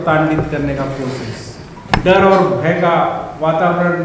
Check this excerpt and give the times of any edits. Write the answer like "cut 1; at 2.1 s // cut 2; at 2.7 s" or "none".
cut 1; at 1.7 s